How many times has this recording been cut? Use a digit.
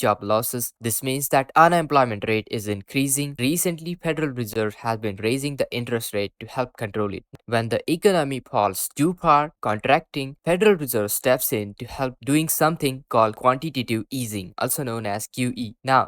2